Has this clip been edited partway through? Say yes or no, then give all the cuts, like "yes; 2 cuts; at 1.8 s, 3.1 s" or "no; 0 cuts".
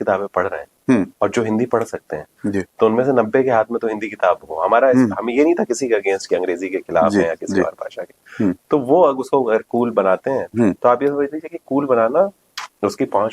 no; 0 cuts